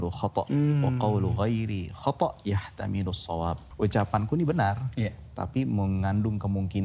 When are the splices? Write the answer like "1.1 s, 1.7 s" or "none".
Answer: 3.7 s